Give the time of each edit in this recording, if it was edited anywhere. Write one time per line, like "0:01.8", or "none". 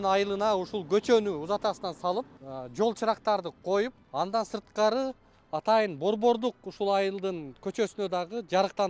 0:02.4
0:04.0